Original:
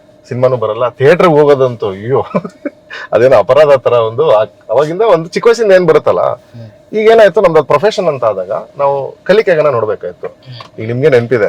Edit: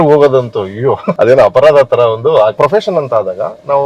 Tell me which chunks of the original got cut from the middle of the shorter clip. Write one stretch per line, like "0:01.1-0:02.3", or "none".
0:02.3-0:03.0
0:04.5-0:07.7